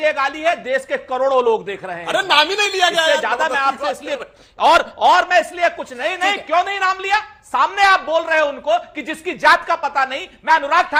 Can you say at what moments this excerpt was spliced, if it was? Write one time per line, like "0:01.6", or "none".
none